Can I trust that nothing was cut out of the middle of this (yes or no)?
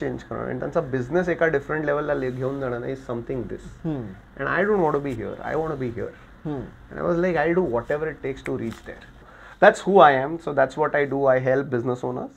no